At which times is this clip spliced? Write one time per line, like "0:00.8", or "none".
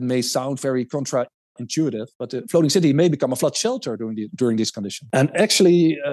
none